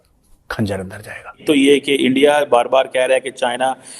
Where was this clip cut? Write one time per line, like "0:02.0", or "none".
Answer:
0:01.4

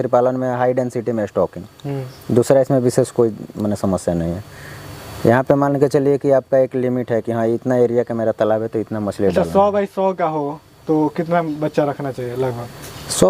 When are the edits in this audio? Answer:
none

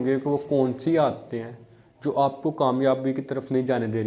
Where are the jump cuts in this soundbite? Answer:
none

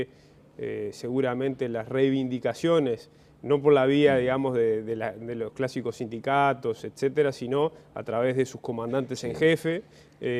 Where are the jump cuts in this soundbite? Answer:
none

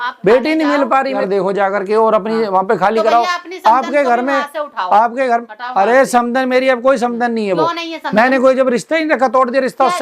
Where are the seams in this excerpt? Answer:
0:01.2

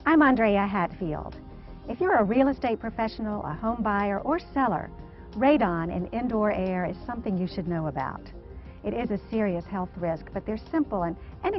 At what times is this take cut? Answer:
0:09.2

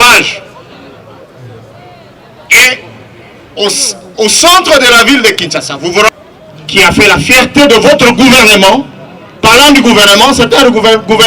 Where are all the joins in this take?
0:06.1

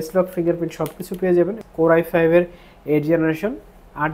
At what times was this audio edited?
0:01.6

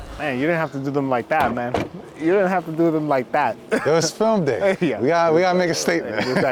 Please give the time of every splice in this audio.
none

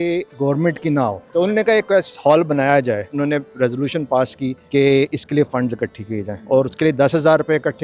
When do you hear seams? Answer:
0:01.2
0:03.1
0:04.6
0:06.3

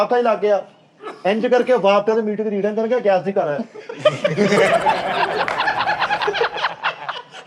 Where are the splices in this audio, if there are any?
none

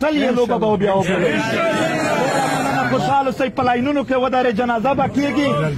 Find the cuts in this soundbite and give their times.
none

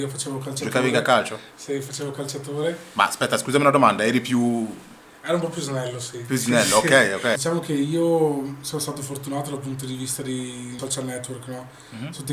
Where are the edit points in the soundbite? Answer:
0:07.4
0:10.8

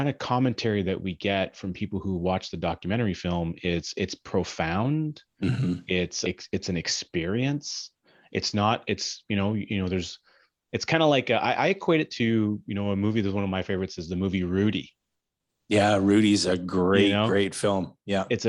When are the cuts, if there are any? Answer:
none

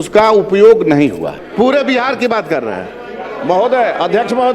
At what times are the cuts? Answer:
0:01.4

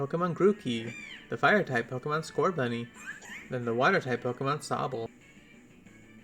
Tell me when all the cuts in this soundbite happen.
0:05.1

